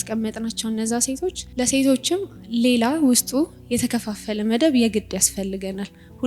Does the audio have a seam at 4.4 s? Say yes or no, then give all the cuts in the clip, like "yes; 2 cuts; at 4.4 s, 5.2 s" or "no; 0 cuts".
no; 1 cut; at 1.4 s